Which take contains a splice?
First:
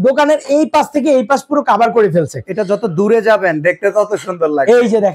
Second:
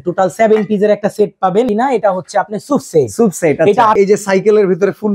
second; 2 cuts; at 1.7 s, 4.0 s

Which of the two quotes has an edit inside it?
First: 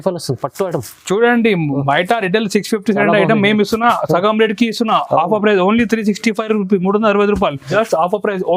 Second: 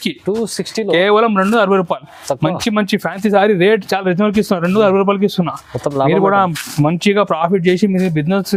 first; 1 cut; at 7.7 s

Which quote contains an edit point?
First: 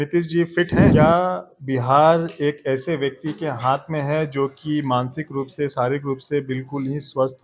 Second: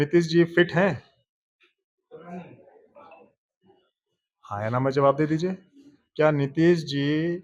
first; 1 cut; at 0.9 s

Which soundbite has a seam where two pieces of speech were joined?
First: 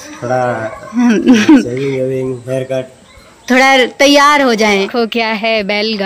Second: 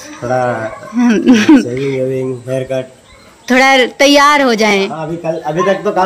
first; 1 cut; at 4.7 s

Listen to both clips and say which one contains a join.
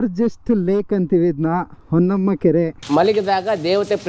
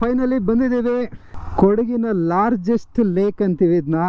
first; 1 cut; at 2.8 s

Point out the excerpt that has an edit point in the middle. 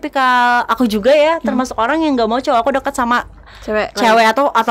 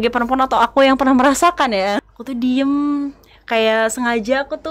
second; 1 cut; at 1.9 s

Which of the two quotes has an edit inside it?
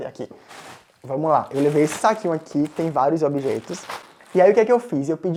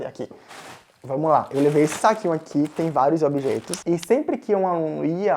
second; 1 cut; at 3.7 s

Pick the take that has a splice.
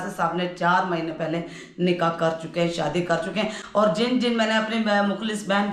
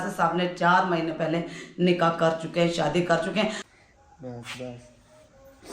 second; 1 cut; at 3.8 s

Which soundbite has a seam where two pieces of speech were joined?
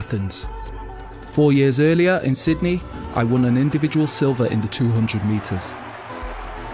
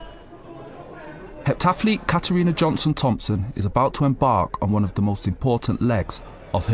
first; 1 cut; at 4.7 s

